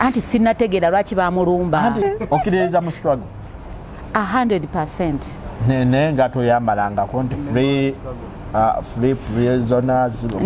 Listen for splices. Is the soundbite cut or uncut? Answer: cut